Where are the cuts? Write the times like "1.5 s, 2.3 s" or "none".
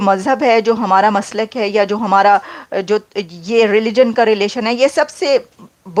none